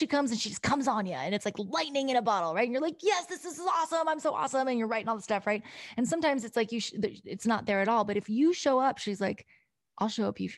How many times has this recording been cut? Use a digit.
0